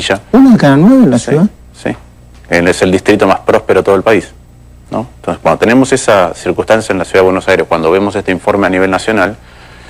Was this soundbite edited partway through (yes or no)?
yes